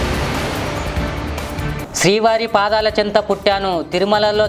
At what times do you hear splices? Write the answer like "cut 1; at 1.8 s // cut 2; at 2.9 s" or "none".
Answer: cut 1; at 1.7 s